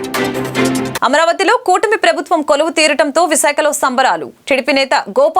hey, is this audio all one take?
no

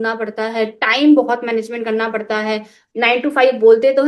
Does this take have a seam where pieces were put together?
no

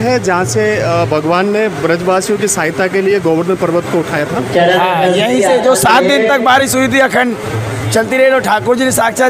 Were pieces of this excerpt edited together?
no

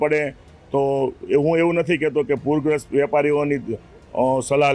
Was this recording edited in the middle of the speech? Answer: no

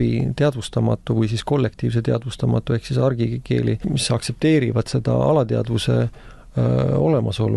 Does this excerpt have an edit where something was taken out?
yes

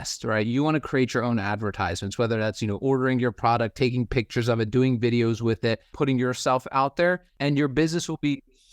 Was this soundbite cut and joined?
yes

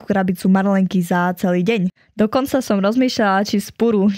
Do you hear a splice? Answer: yes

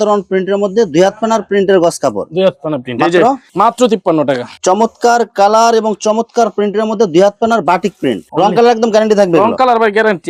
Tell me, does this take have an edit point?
no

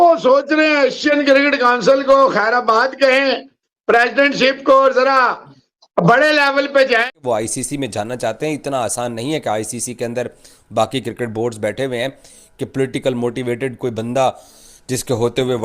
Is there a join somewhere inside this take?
yes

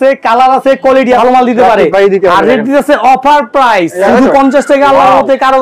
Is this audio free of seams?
no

